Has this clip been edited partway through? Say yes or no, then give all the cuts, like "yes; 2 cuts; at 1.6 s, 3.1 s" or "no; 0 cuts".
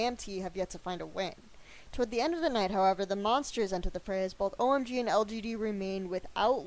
yes; 1 cut; at 1.1 s